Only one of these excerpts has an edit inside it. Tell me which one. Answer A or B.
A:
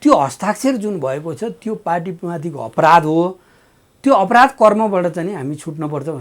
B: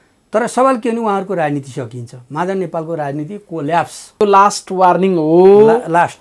B